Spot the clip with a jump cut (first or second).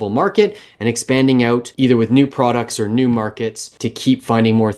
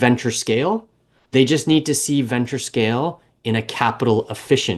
first